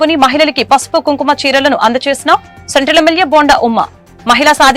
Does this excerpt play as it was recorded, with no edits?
yes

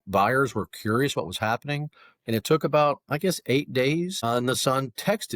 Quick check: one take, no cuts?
no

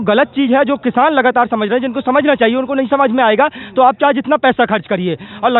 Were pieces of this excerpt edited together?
no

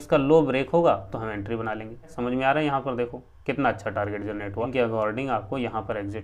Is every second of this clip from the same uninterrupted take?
no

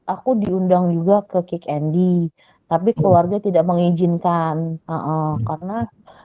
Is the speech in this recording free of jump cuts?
yes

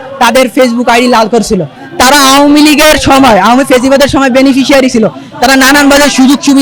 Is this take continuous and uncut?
no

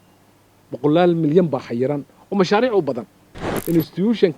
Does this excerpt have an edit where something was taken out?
yes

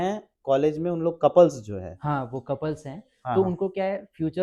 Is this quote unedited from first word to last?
yes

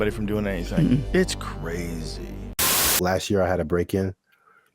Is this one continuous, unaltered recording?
no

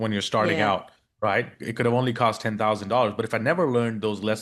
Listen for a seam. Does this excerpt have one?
no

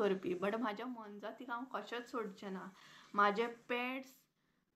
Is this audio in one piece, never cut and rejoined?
yes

